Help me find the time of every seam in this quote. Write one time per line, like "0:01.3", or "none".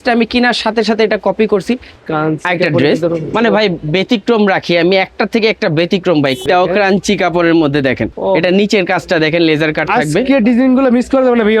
0:01.9
0:06.4
0:08.1